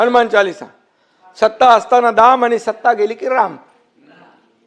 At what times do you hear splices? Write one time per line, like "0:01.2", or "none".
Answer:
none